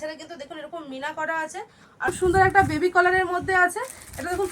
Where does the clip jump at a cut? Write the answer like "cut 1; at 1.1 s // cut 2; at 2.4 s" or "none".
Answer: cut 1; at 2.1 s